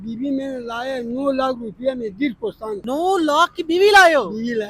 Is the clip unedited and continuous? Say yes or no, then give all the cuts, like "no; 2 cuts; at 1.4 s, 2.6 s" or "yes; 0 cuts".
no; 1 cut; at 2.8 s